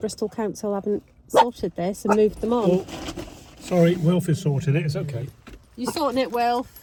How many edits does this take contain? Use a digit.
0